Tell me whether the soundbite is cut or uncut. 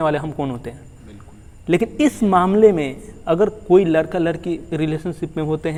uncut